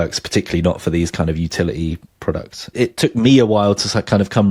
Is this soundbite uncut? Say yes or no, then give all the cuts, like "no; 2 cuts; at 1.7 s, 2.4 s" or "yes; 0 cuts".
no; 1 cut; at 2.3 s